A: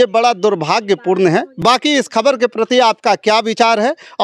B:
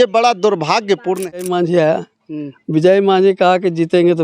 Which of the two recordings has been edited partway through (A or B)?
B